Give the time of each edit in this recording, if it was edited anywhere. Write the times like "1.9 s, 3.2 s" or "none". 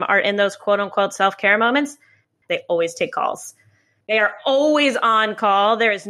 2.4 s, 4.0 s